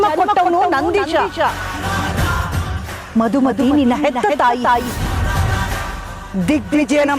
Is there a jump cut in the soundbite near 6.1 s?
yes; 1 cut; at 6.1 s

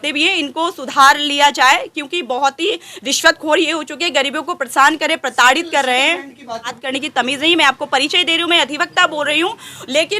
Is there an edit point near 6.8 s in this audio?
yes; 1 cut; at 6.8 s

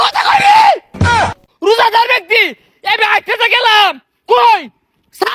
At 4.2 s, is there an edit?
no; 1 cut; at 1.2 s

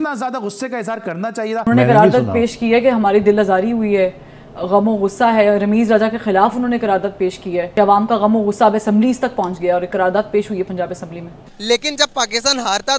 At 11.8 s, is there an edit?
yes; 3 cuts; at 1.7 s, 7.7 s, 11.8 s

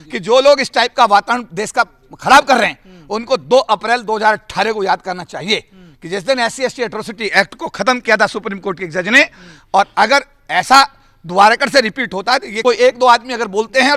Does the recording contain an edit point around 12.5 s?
yes; 1 cut; at 12.5 s

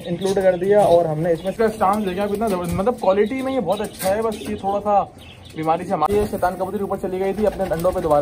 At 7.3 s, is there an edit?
no; 2 cuts; at 1.5 s, 6.1 s

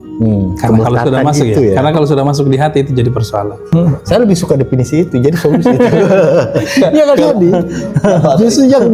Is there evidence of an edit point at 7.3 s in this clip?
yes; 1 cut; at 7.3 s

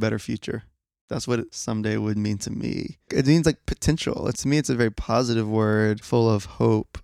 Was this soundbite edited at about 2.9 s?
yes; 2 cuts; at 1.5 s, 2.9 s

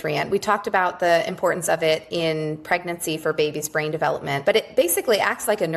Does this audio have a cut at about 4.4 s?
yes; 1 cut; at 4.4 s

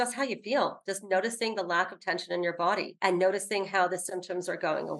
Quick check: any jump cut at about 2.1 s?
no; 0 cuts

